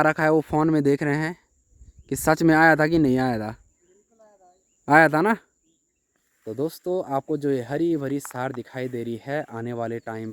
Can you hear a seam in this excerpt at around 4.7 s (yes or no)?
no